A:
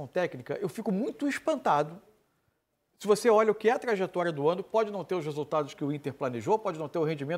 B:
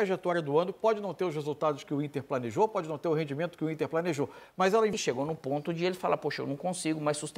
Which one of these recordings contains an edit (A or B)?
B